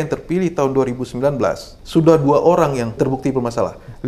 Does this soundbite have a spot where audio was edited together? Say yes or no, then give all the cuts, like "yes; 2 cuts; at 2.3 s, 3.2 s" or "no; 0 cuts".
yes; 2 cuts; at 1.7 s, 3.0 s